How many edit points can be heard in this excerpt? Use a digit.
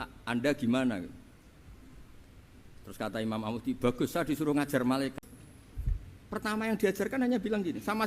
1